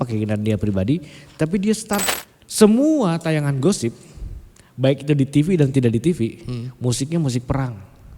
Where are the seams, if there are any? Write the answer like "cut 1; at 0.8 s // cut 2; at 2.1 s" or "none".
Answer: cut 1; at 2.1 s